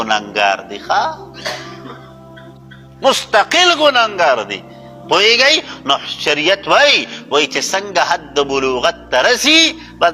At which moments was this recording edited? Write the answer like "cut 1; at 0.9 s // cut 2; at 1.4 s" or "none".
none